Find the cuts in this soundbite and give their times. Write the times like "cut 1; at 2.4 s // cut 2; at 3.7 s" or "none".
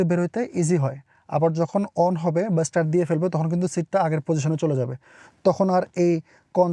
none